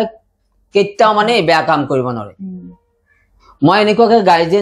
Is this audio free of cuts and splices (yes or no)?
yes